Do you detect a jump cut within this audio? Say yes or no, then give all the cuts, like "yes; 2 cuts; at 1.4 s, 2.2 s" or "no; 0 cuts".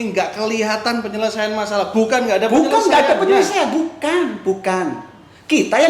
no; 0 cuts